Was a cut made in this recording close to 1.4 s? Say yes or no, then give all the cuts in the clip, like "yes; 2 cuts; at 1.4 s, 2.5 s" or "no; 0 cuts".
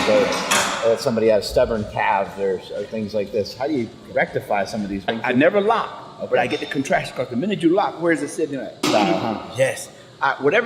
no; 2 cuts; at 5.2 s, 8.8 s